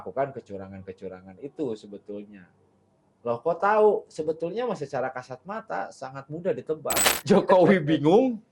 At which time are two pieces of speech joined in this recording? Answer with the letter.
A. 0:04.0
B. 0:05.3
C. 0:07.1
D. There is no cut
C